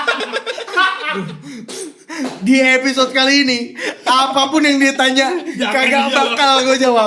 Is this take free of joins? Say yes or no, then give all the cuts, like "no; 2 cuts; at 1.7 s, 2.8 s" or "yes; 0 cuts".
yes; 0 cuts